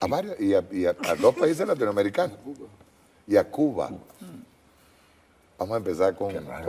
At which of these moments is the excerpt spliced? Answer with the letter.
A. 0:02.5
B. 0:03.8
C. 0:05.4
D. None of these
B